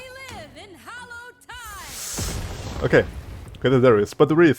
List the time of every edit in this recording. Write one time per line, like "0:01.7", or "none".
none